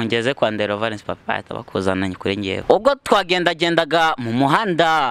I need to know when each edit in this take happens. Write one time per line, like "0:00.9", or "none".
0:02.6

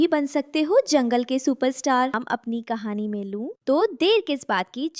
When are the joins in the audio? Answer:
0:02.2

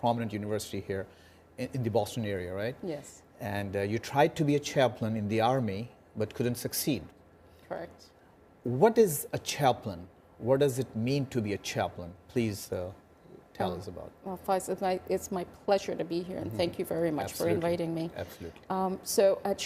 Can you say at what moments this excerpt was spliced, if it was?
0:09.5

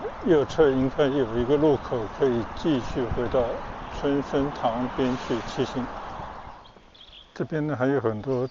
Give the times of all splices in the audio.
0:06.4

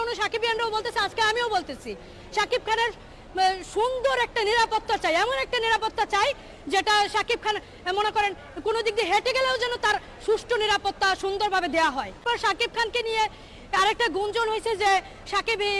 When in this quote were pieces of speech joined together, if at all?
none

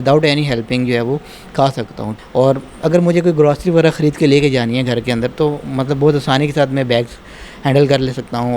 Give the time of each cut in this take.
0:02.1

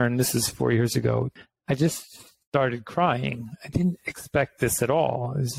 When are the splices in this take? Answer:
0:01.4

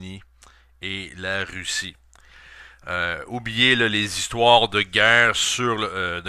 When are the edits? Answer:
0:04.4

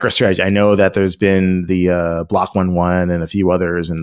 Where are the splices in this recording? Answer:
none

